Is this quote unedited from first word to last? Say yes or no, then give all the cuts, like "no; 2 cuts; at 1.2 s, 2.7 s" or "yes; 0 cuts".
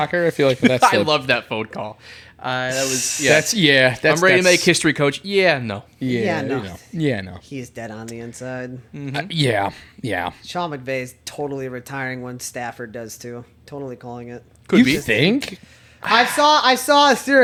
yes; 0 cuts